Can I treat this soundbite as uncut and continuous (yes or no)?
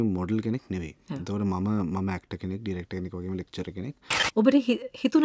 no